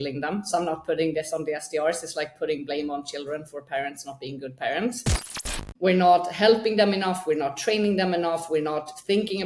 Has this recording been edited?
yes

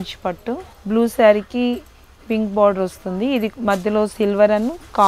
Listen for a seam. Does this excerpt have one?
no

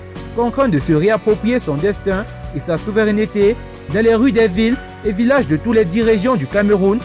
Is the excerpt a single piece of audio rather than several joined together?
yes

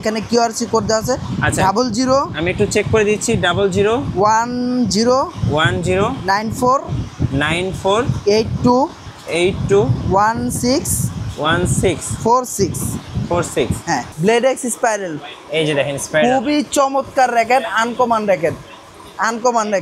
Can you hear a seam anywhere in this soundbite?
yes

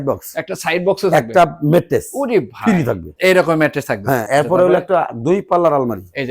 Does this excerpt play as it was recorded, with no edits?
yes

